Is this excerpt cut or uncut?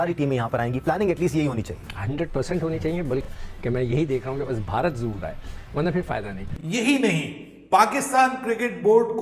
cut